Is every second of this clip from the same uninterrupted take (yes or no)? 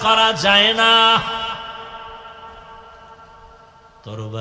yes